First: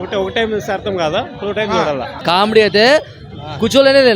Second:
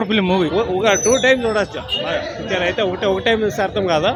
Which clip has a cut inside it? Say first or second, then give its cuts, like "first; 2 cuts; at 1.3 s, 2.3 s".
first; 1 cut; at 2.2 s